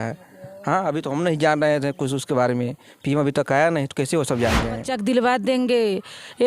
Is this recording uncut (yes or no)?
no